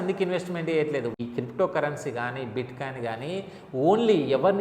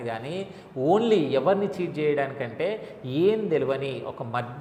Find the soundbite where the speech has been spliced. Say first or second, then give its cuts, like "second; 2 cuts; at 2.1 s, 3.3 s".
first; 1 cut; at 1.1 s